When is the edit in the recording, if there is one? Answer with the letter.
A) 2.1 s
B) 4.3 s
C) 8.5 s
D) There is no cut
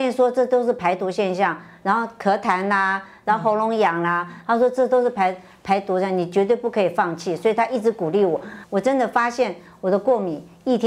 C